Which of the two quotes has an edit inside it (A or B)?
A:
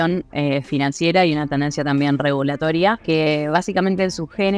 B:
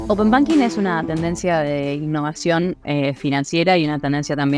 A